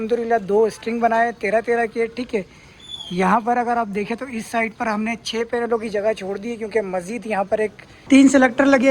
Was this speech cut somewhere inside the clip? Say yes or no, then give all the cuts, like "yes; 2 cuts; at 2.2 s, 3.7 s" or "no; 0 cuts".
yes; 1 cut; at 7.9 s